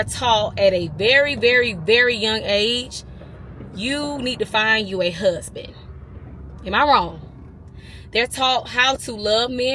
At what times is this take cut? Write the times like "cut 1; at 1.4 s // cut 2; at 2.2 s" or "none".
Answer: none